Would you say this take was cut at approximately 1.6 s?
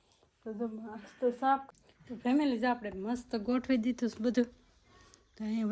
yes; 1 cut; at 1.6 s

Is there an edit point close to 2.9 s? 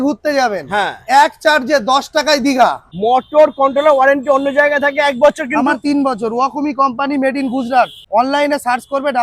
yes; 2 cuts; at 2.9 s, 8.0 s

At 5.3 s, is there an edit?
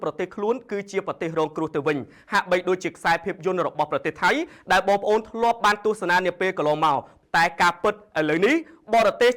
no; 1 cut; at 7.1 s

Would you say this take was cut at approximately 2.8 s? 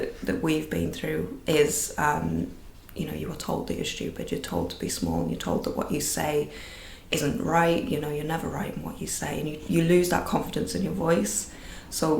no; 1 cut; at 1.4 s

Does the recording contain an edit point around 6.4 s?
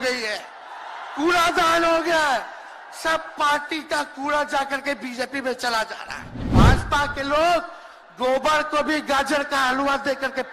yes; 1 cut; at 6.4 s

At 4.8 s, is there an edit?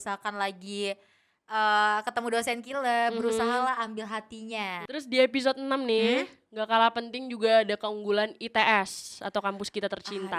yes; 1 cut; at 4.8 s

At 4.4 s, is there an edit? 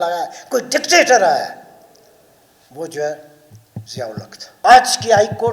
yes; 1 cut; at 4.4 s

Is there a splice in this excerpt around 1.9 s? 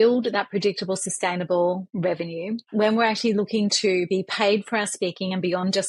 yes; 1 cut; at 1.9 s

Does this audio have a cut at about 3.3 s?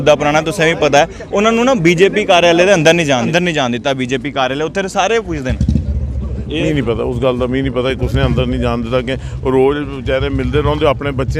yes; 1 cut; at 3.3 s

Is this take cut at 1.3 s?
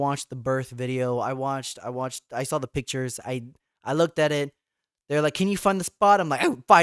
no; 0 cuts

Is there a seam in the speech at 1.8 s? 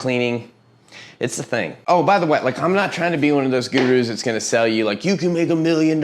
yes; 1 cut; at 1.8 s

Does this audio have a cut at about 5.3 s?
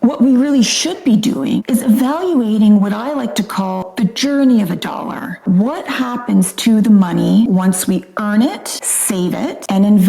yes; 3 cuts; at 1.6 s, 3.9 s, 5.3 s

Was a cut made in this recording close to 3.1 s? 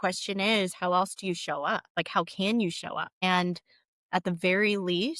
yes; 2 cuts; at 1.9 s, 3.1 s

